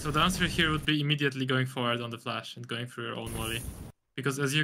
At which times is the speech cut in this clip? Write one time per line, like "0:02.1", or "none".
none